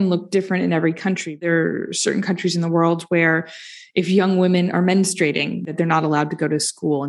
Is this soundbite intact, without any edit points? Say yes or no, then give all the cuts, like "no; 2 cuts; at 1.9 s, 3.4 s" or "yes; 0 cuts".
no; 2 cuts; at 1.5 s, 5.7 s